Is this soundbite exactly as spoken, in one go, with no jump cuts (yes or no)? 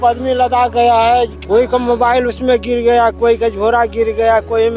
no